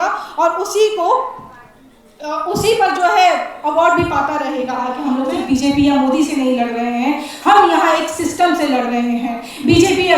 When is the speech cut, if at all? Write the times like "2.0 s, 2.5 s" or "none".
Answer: 4.9 s